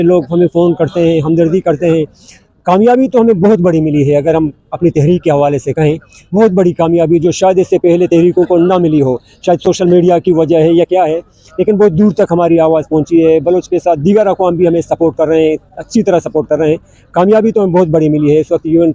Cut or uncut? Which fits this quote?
uncut